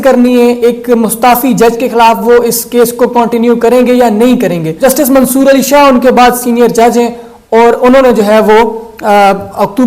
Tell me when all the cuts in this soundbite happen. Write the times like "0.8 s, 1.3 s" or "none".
none